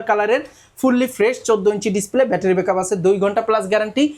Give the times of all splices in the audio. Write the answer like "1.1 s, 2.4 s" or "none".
none